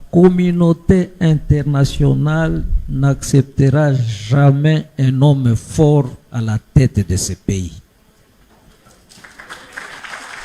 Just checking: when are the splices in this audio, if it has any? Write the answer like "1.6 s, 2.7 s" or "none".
1.1 s